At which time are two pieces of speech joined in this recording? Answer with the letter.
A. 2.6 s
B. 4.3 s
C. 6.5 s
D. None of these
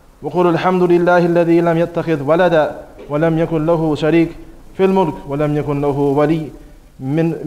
B